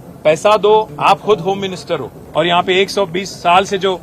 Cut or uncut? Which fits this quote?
cut